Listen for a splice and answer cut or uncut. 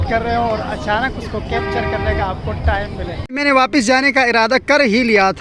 cut